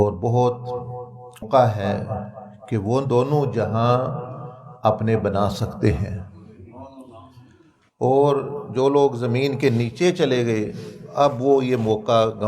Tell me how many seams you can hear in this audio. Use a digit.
1